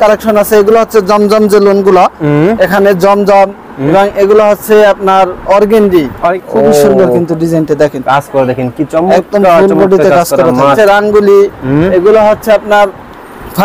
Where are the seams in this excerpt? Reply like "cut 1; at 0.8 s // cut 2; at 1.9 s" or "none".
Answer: cut 1; at 6.3 s // cut 2; at 10.8 s